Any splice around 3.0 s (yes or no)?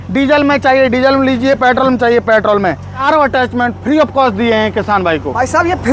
yes